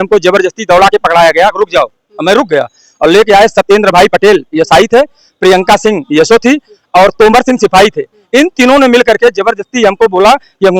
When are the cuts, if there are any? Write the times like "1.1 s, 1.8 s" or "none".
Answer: none